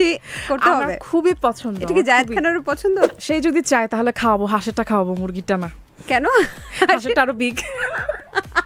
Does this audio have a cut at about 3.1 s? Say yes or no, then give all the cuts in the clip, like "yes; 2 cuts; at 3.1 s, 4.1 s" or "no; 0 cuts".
yes; 1 cut; at 3.1 s